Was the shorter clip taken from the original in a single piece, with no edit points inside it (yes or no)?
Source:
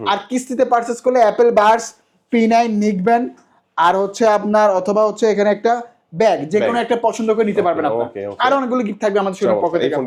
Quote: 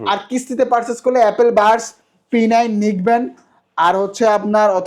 yes